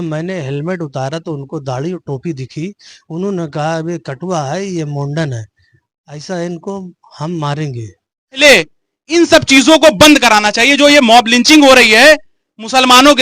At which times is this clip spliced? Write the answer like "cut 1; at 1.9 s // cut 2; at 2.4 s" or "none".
cut 1; at 8.4 s

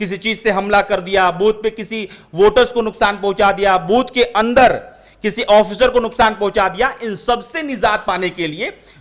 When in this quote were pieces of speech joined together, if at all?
none

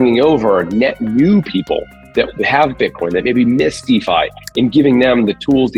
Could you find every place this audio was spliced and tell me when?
none

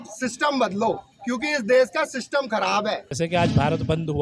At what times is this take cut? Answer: cut 1; at 3.1 s

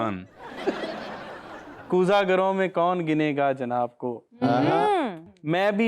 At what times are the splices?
cut 1; at 1.7 s

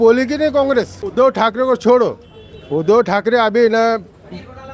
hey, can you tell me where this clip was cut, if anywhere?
cut 1; at 1.0 s

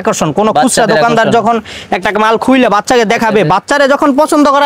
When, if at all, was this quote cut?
none

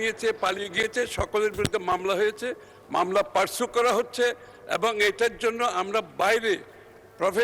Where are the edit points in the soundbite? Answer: none

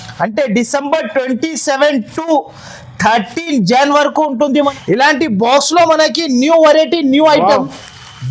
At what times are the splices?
cut 1; at 4.7 s

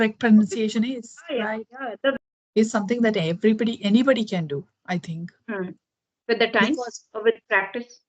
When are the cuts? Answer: cut 1; at 2.1 s

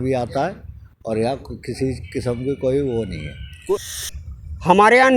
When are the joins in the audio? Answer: cut 1; at 3.9 s

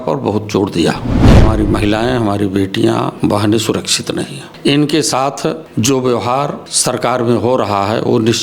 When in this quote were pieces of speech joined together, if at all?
cut 1; at 1.4 s // cut 2; at 3.1 s // cut 3; at 4.4 s // cut 4; at 5.6 s // cut 5; at 6.7 s

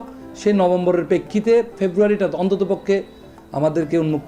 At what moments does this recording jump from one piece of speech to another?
none

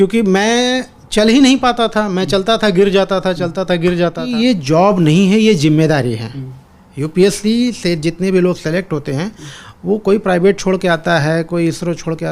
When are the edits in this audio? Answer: cut 1; at 4.2 s

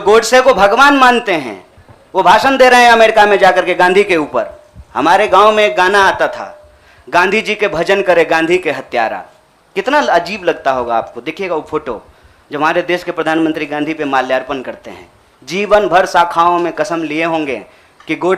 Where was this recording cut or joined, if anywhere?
none

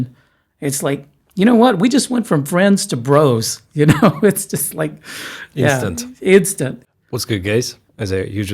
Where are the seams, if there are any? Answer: cut 1; at 6.8 s

